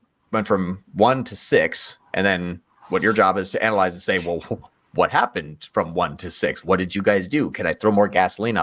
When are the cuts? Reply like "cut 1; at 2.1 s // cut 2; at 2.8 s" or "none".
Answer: none